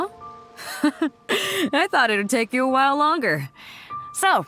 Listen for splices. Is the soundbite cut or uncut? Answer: cut